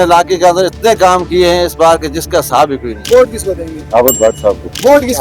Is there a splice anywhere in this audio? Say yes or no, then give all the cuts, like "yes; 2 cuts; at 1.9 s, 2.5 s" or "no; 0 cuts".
no; 0 cuts